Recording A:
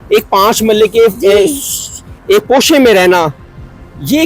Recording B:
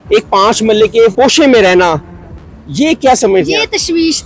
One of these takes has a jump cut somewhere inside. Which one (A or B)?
B